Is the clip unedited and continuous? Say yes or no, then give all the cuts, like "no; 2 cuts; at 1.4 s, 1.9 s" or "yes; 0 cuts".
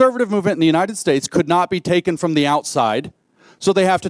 yes; 0 cuts